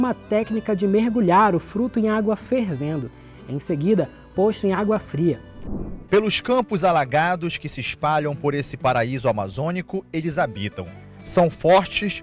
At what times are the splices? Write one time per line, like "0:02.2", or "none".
0:05.5